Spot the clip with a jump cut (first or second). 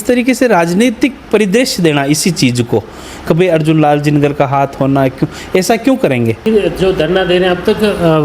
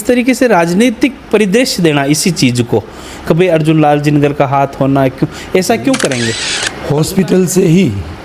second